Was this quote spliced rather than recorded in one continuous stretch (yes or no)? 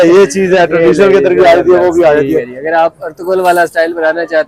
no